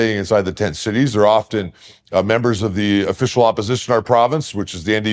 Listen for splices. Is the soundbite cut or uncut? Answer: uncut